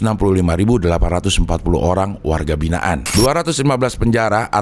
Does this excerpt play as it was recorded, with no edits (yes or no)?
no